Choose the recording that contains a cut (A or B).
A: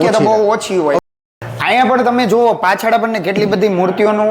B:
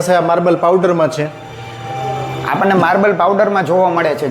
A